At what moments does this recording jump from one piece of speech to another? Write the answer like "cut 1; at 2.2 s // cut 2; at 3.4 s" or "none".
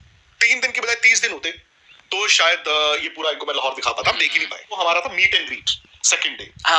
cut 1; at 4.7 s